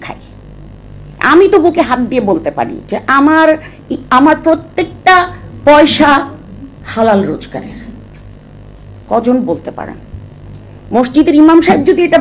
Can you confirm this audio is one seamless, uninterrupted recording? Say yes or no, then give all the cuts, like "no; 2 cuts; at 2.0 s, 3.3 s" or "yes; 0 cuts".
yes; 0 cuts